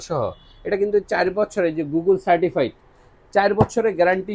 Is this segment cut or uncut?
uncut